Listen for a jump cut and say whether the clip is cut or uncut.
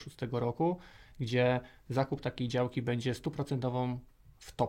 uncut